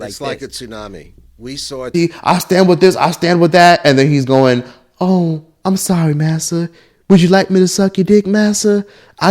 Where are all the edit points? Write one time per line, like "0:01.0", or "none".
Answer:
0:01.9